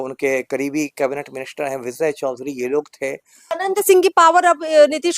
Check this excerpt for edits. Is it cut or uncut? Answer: cut